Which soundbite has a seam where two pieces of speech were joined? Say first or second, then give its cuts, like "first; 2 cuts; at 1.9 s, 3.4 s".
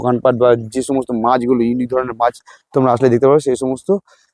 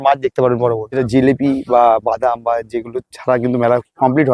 second; 1 cut; at 1.0 s